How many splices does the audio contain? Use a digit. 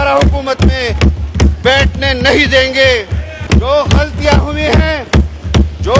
1